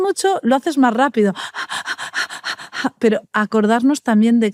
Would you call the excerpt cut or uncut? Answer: uncut